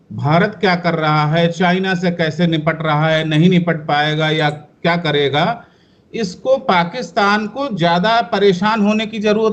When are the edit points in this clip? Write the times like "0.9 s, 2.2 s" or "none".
none